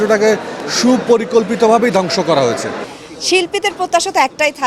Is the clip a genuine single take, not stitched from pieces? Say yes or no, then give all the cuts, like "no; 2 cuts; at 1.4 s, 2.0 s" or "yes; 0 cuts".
no; 1 cut; at 2.9 s